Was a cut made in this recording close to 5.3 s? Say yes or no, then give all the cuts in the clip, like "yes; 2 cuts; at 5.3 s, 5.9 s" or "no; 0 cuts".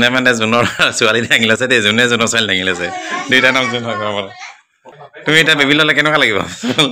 yes; 1 cut; at 5.3 s